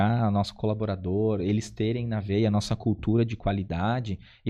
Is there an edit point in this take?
no; 0 cuts

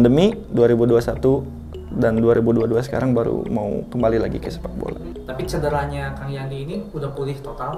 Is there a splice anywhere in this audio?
yes; 1 cut; at 5.1 s

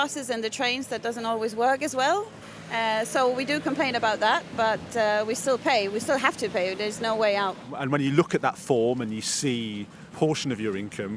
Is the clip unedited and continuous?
yes; 0 cuts

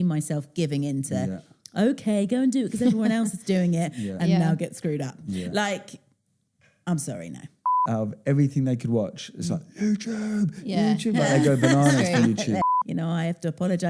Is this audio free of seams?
no; 2 cuts; at 7.8 s, 12.7 s

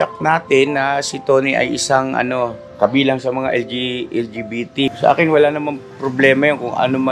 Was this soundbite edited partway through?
yes; 2 cuts; at 2.6 s, 4.9 s

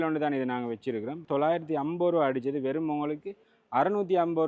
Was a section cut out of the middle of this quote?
yes; 1 cut; at 1.2 s

